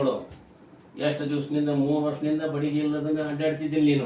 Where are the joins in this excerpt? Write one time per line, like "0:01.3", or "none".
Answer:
none

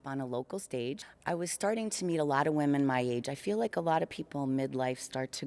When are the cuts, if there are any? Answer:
0:01.1

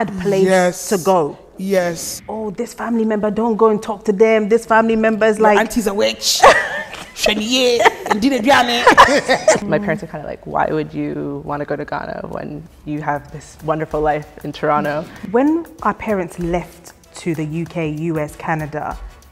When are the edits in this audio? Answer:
0:02.1
0:09.6
0:15.1

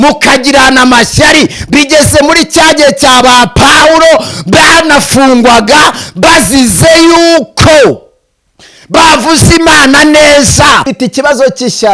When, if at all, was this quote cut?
0:10.9

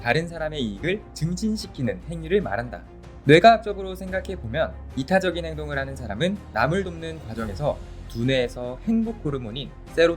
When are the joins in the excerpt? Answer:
0:03.1

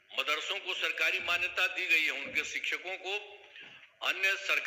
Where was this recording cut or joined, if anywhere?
none

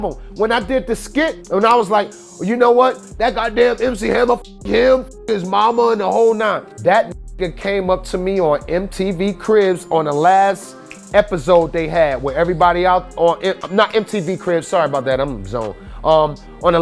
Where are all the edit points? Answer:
0:01.4
0:06.7

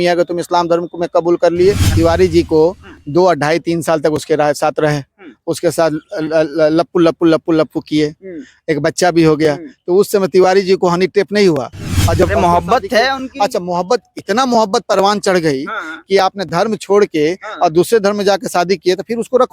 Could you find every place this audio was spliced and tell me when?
0:01.9
0:12.3

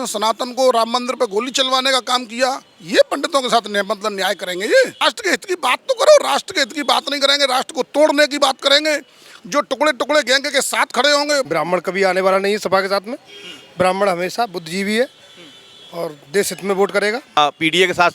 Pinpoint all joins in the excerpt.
0:05.0
0:11.5
0:17.4

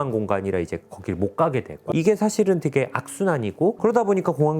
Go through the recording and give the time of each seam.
0:01.8

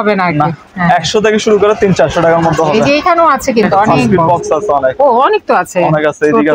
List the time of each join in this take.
0:04.3

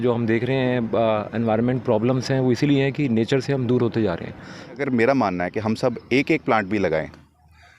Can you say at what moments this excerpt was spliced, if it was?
0:04.8

